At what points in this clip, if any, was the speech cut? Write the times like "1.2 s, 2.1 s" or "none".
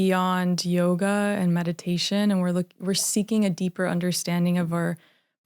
none